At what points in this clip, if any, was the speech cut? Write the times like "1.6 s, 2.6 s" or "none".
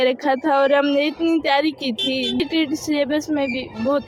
2.4 s